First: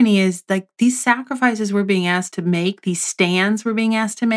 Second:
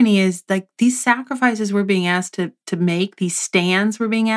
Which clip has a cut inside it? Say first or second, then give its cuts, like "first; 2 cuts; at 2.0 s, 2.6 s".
first; 1 cut; at 2.3 s